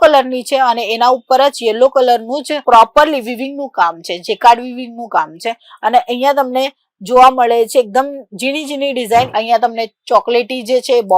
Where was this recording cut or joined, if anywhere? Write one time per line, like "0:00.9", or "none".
0:09.3